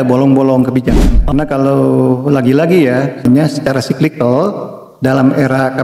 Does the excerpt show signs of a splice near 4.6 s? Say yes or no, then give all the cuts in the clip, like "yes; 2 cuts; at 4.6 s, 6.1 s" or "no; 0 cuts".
no; 2 cuts; at 1.0 s, 3.2 s